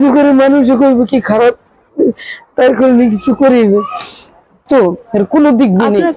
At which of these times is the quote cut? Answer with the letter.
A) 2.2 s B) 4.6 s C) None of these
B